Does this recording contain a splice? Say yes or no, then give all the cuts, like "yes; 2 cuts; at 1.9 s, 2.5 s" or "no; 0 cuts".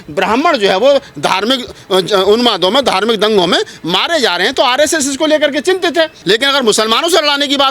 yes; 1 cut; at 6.2 s